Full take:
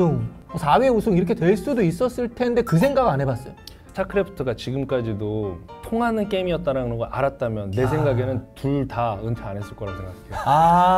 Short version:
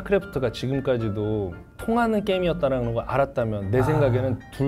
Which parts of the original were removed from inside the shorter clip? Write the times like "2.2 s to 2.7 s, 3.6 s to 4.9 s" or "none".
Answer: none